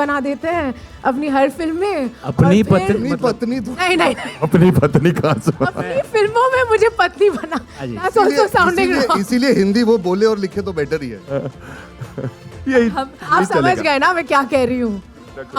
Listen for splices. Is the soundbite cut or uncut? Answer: uncut